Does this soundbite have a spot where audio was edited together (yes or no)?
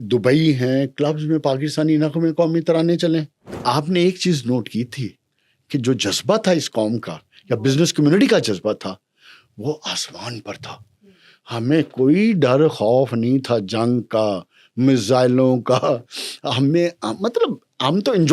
yes